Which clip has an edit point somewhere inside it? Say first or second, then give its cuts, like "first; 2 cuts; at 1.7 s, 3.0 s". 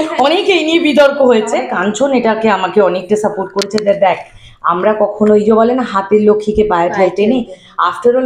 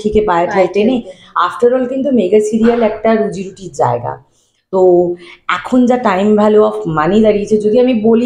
first; 1 cut; at 1.7 s